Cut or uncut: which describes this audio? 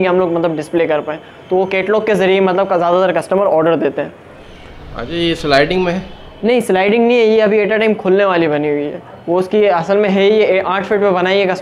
uncut